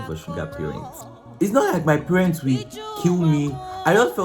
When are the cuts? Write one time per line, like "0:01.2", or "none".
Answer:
0:01.4